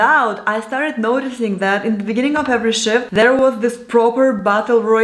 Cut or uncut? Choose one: uncut